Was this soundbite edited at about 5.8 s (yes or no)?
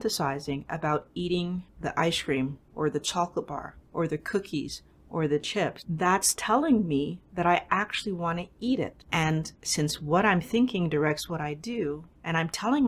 yes